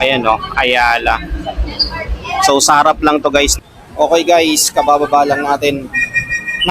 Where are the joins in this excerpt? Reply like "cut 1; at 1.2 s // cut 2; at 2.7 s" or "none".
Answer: cut 1; at 3.5 s